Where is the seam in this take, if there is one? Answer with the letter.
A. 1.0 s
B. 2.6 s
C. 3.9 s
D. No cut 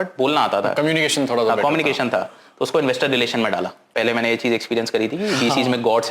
C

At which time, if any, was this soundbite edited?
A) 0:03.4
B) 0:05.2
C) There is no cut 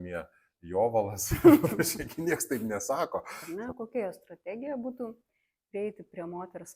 A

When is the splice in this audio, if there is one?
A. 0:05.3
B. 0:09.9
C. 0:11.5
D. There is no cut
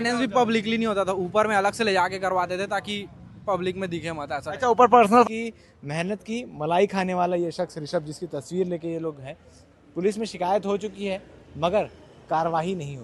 A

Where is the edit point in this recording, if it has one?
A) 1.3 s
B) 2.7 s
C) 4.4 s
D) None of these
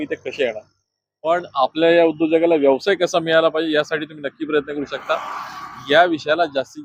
D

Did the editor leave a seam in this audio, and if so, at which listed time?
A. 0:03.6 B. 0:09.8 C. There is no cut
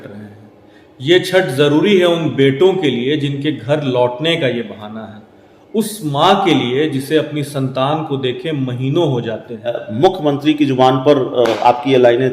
B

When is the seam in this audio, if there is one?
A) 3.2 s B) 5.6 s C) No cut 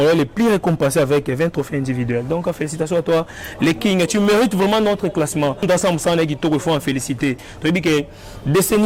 B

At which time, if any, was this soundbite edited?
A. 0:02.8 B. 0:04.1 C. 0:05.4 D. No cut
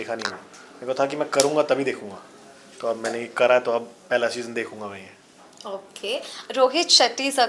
D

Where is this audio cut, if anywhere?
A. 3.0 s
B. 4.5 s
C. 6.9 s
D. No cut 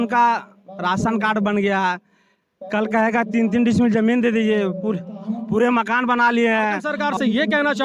C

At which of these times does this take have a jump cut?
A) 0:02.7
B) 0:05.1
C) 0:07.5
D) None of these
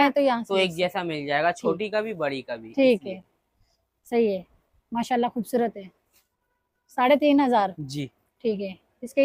D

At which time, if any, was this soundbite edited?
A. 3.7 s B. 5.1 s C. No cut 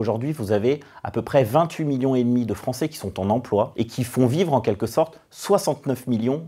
A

